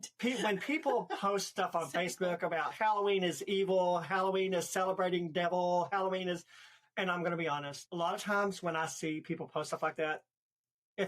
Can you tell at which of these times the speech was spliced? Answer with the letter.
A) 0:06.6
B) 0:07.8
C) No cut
B